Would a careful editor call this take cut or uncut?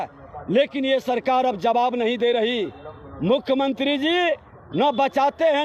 uncut